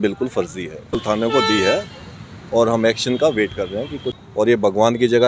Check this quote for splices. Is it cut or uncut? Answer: cut